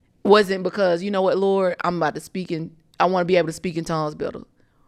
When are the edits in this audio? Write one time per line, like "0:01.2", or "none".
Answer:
none